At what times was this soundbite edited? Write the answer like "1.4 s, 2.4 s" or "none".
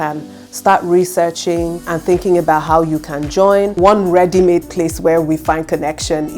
3.7 s